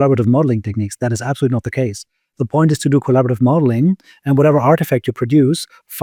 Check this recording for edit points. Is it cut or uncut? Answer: uncut